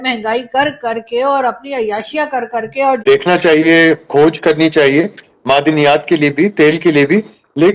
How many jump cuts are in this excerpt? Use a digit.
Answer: 1